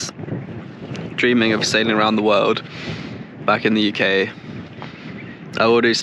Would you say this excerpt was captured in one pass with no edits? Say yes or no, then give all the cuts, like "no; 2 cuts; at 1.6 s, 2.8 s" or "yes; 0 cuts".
yes; 0 cuts